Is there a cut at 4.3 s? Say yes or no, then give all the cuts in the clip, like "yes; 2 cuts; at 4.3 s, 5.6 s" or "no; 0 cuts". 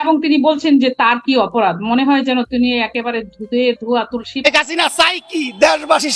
yes; 1 cut; at 4.3 s